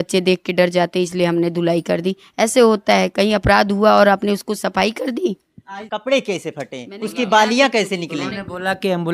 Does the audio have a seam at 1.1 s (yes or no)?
no